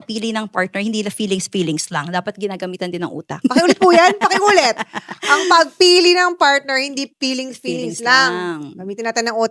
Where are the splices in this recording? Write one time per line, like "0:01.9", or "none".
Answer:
0:03.3